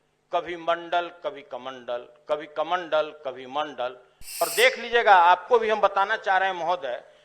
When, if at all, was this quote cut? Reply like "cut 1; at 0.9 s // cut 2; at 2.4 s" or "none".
cut 1; at 4.5 s

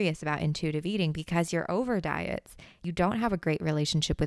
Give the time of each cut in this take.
cut 1; at 2.8 s

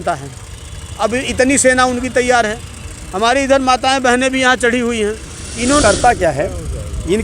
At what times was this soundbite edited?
cut 1; at 5.8 s

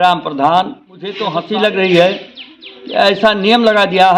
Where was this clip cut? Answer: cut 1; at 1.2 s

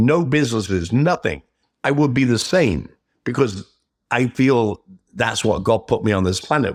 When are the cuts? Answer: none

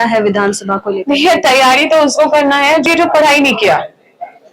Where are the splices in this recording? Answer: cut 1; at 2.8 s

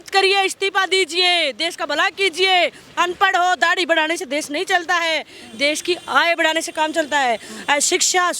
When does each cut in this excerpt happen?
none

